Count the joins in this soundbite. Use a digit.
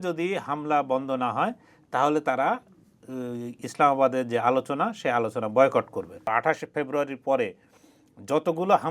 1